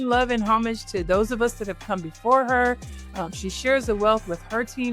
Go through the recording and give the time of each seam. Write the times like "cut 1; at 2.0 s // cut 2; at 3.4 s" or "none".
none

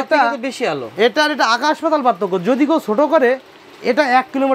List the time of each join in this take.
none

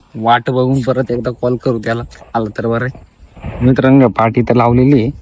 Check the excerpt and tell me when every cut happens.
none

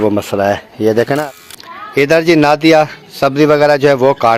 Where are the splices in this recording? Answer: cut 1; at 1.2 s

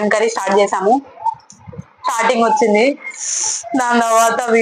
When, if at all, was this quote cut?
none

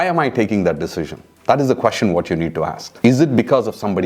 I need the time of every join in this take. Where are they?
cut 1; at 2.8 s

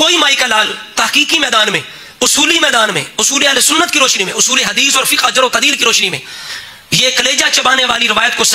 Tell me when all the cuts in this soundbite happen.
none

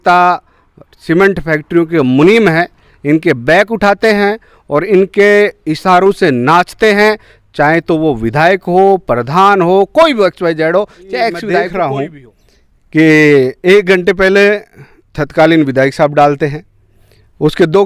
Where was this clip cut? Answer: cut 1; at 11.5 s

